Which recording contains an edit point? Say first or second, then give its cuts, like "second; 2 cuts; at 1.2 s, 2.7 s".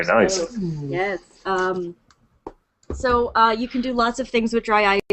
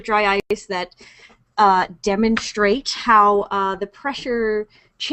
first; 1 cut; at 2.9 s